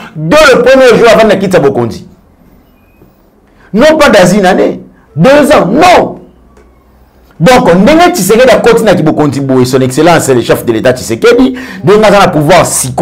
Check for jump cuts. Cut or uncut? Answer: uncut